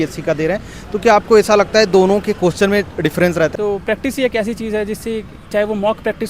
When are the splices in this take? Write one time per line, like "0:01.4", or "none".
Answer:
0:03.5

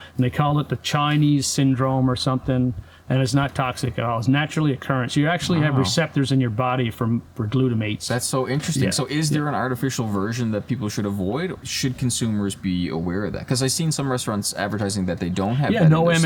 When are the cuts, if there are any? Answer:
0:08.0
0:11.5

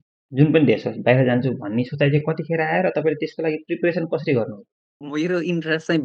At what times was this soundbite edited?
0:05.0

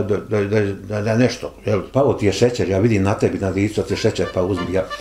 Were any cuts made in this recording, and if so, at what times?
0:01.9

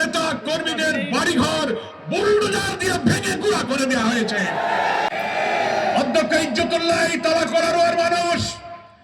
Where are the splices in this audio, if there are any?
0:05.1

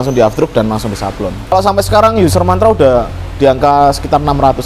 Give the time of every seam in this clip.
0:01.5

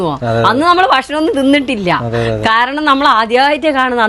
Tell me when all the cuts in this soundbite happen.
none

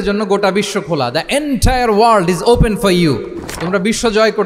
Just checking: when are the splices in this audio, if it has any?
none

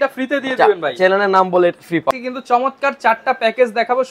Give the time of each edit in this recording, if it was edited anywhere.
0:02.1

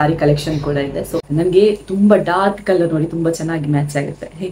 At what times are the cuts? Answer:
0:01.2

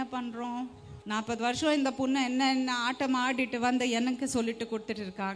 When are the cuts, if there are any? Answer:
0:01.0

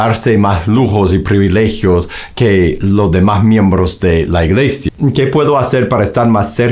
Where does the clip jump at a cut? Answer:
0:04.8

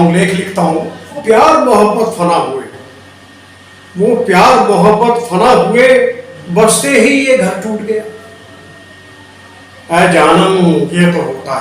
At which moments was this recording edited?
0:01.2

